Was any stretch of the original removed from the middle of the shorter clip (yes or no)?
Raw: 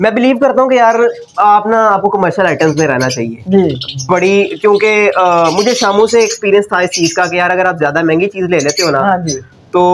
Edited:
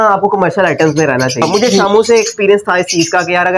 yes